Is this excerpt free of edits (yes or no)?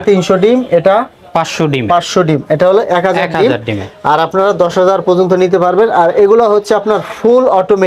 yes